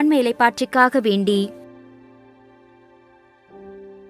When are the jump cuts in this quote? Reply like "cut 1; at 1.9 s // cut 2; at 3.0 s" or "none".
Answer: cut 1; at 1.5 s